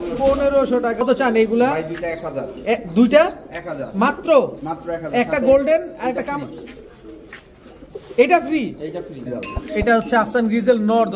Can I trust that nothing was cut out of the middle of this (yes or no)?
no